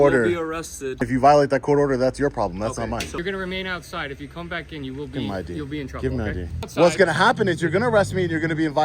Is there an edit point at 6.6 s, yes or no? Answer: yes